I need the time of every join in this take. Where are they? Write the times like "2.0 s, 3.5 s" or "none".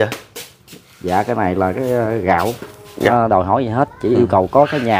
3.1 s